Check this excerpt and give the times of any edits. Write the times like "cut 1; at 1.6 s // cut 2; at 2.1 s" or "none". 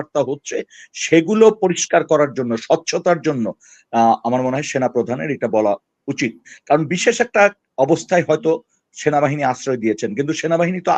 none